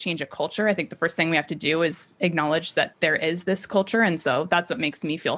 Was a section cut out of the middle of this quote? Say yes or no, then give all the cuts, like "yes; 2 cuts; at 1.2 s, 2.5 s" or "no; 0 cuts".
yes; 1 cut; at 2.9 s